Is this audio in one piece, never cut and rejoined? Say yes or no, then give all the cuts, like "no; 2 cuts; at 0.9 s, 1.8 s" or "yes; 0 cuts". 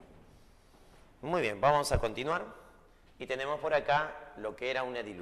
yes; 0 cuts